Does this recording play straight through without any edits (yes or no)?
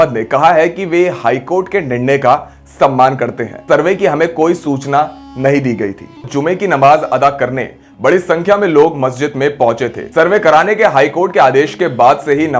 no